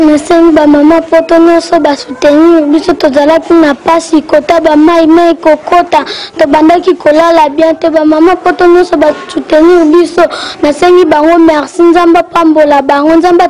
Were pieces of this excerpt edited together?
no; 0 cuts

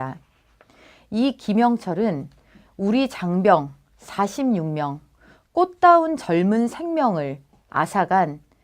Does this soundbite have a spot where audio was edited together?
yes; 1 cut; at 2.3 s

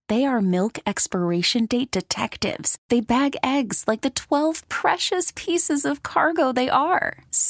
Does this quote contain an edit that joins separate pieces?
no; 0 cuts

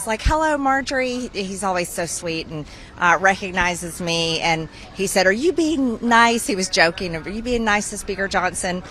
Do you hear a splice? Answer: no; 0 cuts

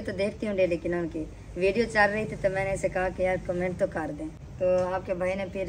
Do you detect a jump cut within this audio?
no; 0 cuts

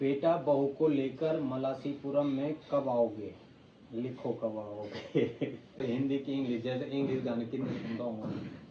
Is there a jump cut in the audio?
yes; 1 cut; at 5.8 s

